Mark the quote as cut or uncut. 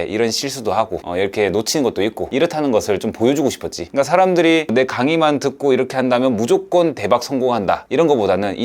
uncut